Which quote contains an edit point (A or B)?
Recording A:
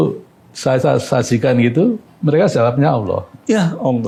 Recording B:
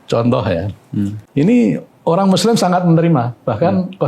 B